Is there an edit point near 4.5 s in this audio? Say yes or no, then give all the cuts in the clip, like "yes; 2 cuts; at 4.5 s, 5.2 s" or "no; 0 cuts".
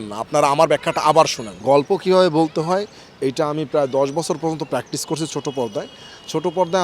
no; 1 cut; at 1.5 s